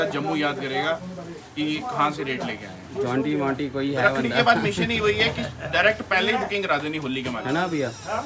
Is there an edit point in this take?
no; 0 cuts

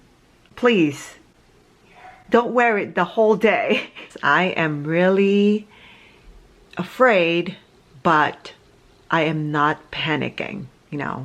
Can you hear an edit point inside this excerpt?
yes; 1 cut; at 4.0 s

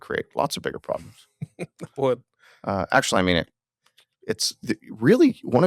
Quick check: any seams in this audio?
no; 0 cuts

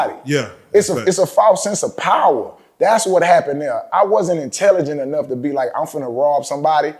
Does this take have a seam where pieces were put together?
no; 0 cuts

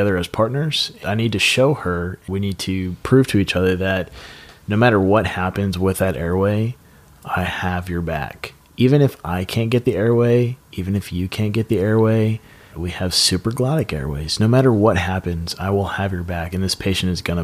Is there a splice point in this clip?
yes; 3 cuts; at 1.0 s, 2.2 s, 12.8 s

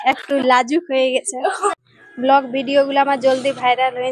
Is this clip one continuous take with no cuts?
no; 1 cut; at 1.7 s

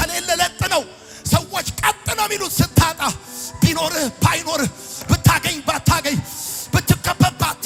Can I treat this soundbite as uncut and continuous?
yes; 0 cuts

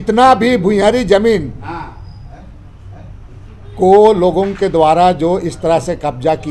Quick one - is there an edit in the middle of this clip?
no; 0 cuts

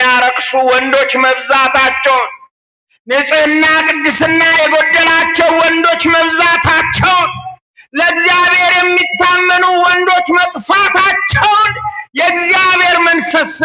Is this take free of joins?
yes; 0 cuts

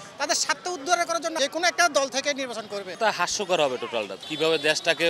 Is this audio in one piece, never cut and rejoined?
no; 3 cuts; at 1.4 s, 2.8 s, 4.2 s

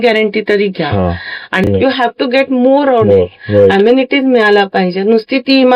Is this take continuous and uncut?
no; 1 cut; at 1.6 s

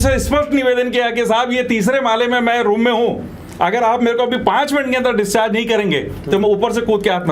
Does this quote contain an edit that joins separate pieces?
no; 0 cuts

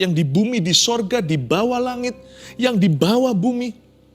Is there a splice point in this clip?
yes; 1 cut; at 1.9 s

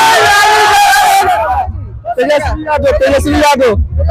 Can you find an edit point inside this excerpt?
no; 0 cuts

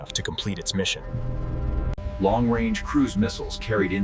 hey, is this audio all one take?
no; 1 cut; at 1.9 s

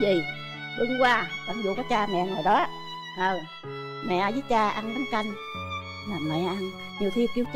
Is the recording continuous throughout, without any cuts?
yes; 0 cuts

